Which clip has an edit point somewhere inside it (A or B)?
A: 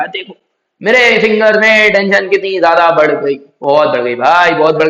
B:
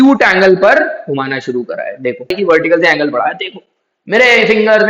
B